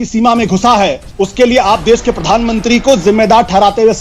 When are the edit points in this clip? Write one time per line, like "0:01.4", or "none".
0:01.0